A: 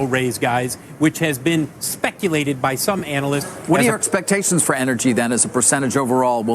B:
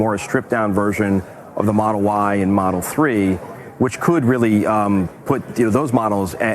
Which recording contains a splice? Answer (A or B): A